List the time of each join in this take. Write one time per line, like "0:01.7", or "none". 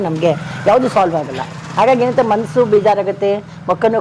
none